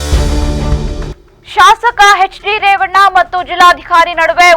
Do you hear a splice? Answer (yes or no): yes